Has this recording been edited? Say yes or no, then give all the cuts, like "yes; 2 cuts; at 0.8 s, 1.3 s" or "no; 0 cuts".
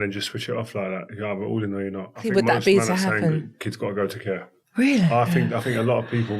yes; 3 cuts; at 2.2 s, 4.6 s, 5.6 s